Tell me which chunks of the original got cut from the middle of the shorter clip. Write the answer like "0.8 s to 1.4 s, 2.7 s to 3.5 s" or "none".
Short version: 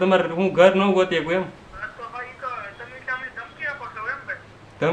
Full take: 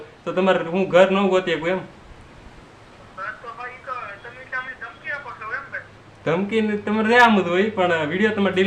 2.2 s to 3.3 s

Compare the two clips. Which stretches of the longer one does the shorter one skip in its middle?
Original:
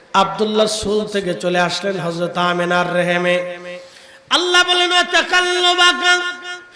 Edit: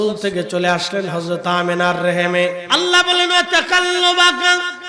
3.5 s to 4.2 s

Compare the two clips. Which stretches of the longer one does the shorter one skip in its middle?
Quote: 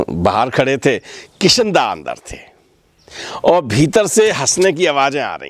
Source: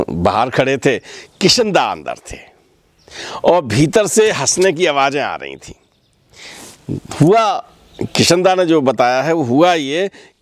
none

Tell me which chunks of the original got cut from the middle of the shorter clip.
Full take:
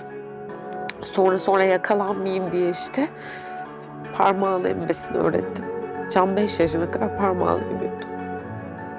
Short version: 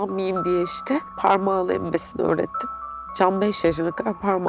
3.2 s to 4.1 s

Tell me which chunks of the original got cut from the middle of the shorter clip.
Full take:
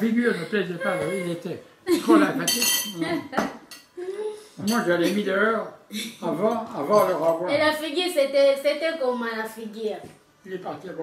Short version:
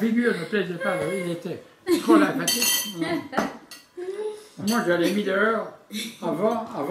none

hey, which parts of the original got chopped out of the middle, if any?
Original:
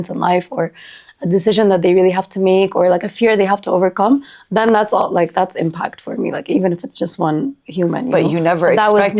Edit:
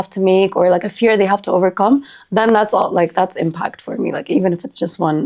none

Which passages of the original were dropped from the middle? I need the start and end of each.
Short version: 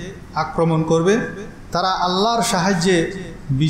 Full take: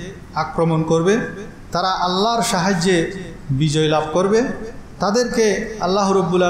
none

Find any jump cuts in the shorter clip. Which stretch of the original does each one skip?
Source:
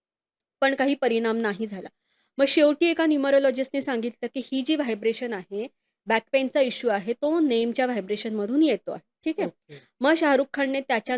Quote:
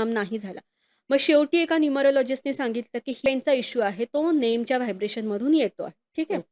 4.5 s to 6.3 s

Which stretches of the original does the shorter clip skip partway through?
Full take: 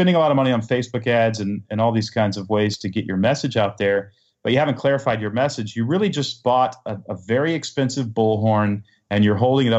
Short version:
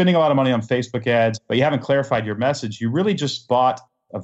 1.4 s to 4.3 s

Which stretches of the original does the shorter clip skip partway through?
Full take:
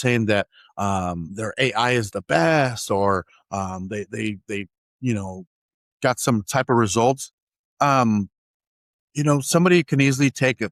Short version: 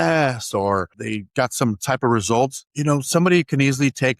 3.4 s to 5.7 s, 7.3 s to 9.1 s

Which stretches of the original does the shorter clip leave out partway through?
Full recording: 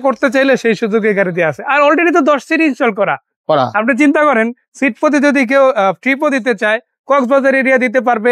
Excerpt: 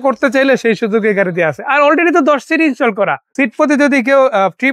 3.2 s to 4.7 s

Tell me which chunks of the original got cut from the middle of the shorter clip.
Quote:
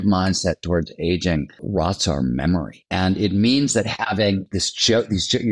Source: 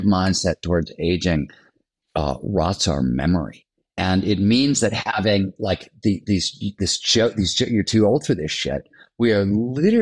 1.6 s to 2.4 s, 3.6 s to 3.8 s, 5.5 s to 6.7 s

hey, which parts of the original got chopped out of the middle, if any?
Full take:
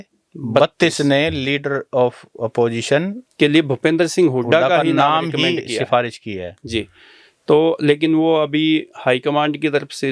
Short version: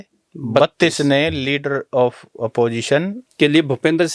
none

